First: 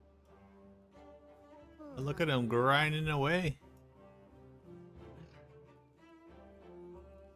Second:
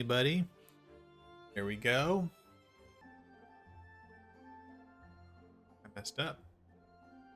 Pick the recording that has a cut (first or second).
second